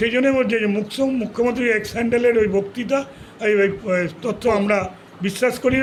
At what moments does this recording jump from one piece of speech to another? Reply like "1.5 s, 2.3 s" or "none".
none